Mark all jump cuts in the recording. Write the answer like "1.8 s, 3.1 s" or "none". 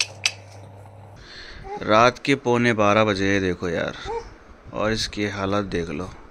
1.3 s